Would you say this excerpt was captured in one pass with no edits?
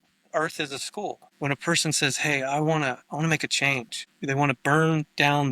no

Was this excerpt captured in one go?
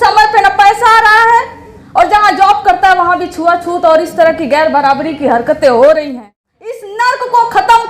no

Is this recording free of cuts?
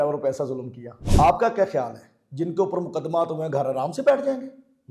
no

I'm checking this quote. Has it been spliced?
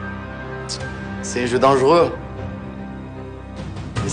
no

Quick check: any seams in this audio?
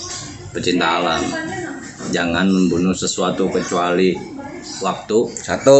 no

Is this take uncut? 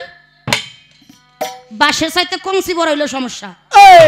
yes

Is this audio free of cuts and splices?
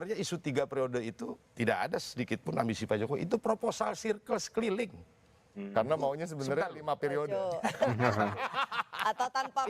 yes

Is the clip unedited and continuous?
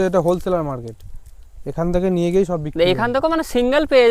yes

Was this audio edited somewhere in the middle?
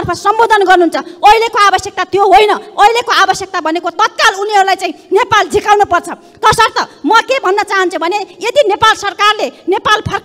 no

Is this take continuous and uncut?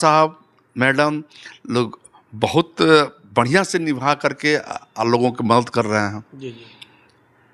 yes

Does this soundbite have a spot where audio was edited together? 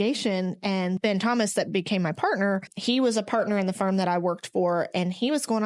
yes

